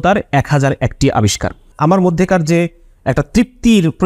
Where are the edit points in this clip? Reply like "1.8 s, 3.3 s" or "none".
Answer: none